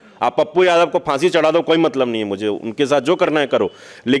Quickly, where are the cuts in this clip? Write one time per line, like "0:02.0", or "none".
none